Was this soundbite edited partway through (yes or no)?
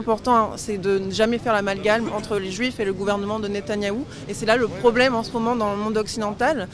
no